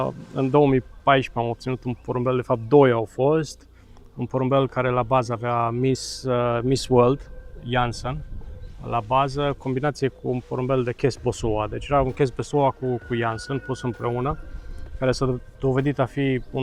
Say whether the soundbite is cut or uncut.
uncut